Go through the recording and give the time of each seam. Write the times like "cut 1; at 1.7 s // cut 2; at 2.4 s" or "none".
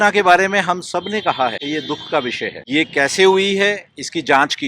cut 1; at 1.6 s // cut 2; at 2.6 s